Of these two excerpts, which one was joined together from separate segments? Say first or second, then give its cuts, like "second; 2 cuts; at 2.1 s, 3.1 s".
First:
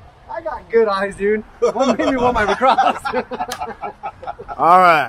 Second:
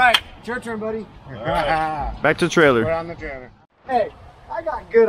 second; 1 cut; at 3.3 s